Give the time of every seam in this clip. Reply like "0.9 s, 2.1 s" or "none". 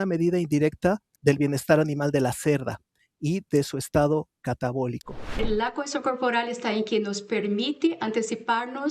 1.1 s, 5.4 s